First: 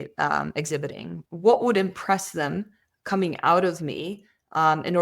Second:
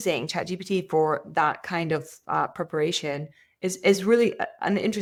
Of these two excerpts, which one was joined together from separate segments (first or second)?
first